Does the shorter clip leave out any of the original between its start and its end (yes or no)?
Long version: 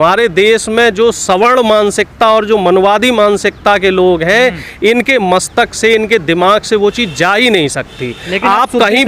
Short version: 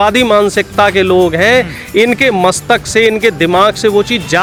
no